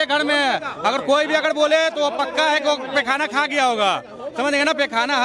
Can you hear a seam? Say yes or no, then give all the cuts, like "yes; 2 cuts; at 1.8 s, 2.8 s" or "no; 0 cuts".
no; 0 cuts